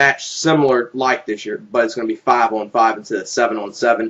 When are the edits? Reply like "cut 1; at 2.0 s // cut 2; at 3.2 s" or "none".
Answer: cut 1; at 2.7 s